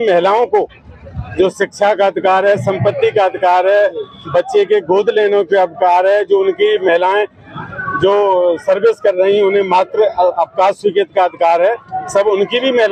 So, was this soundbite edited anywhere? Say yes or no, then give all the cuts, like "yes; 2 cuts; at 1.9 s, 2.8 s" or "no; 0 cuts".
no; 0 cuts